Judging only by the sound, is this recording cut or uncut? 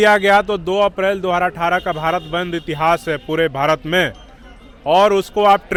uncut